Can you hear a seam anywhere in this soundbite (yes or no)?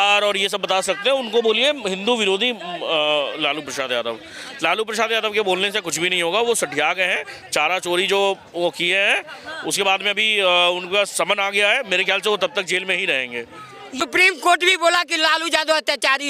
yes